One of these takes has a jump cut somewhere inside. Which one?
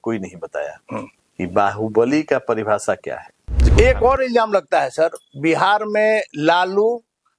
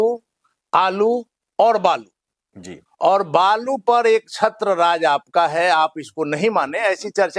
first; 1 cut; at 3.6 s

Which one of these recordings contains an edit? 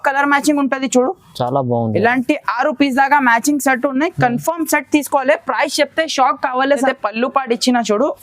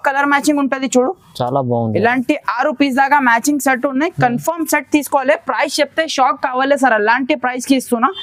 first; 1 cut; at 6.9 s

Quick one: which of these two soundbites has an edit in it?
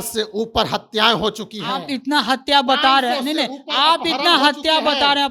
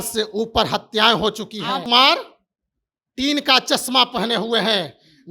second; 1 cut; at 1.8 s

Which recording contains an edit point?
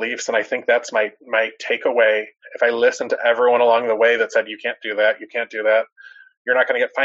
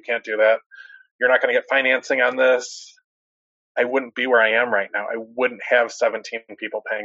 first; 1 cut; at 2.4 s

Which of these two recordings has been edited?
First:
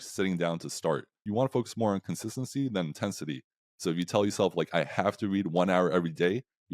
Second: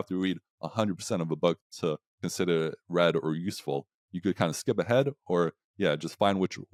first; 1 cut; at 1.2 s

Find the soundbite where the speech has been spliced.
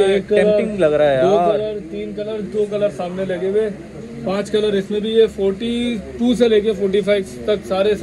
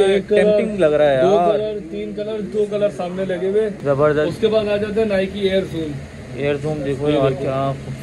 second; 1 cut; at 3.8 s

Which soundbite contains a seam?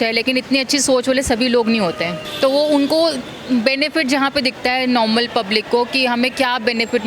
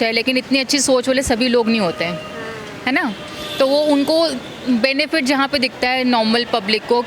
first; 1 cut; at 2.2 s

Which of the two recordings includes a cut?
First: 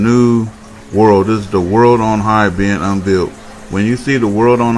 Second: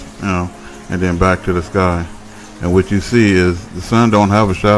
second; 1 cut; at 3.5 s

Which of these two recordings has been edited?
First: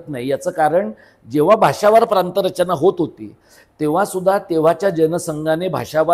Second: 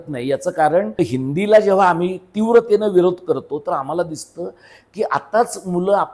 second; 1 cut; at 1.0 s

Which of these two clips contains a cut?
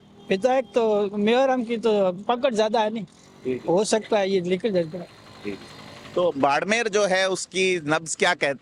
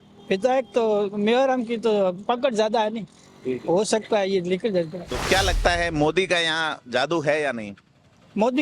second; 1 cut; at 5.1 s

